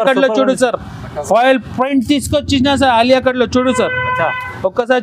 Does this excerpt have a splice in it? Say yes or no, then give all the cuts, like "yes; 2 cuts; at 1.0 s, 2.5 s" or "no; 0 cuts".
no; 0 cuts